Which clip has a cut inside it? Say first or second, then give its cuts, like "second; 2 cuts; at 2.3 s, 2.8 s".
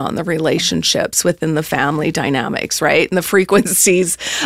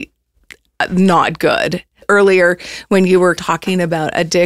second; 2 cuts; at 2.0 s, 3.4 s